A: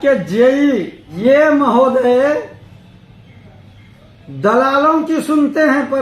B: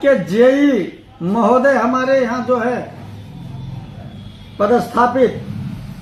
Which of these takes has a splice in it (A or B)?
A